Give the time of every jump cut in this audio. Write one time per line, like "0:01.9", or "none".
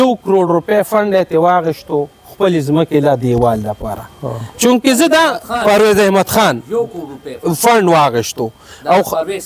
none